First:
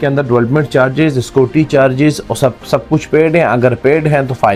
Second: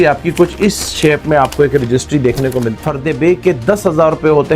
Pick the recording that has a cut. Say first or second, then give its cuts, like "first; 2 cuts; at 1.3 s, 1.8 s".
second; 1 cut; at 2.8 s